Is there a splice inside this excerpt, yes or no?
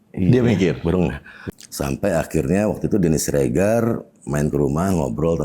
yes